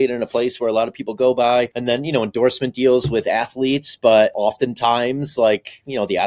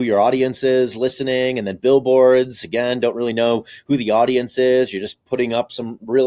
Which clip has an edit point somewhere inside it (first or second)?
first